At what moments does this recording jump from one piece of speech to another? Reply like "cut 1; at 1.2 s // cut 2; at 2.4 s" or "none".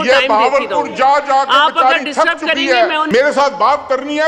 cut 1; at 3.1 s